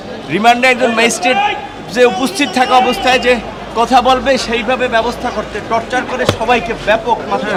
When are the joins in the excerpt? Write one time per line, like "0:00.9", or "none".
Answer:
none